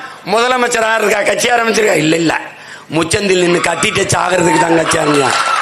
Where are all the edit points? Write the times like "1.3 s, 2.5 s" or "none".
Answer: none